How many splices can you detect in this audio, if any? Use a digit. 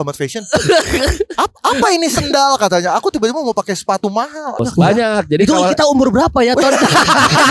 1